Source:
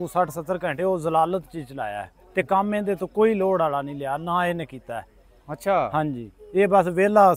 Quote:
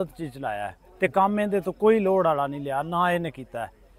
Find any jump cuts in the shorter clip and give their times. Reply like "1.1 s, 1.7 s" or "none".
none